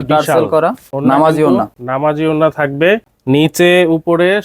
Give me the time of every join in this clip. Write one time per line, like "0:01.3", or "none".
0:00.9
0:01.8
0:03.1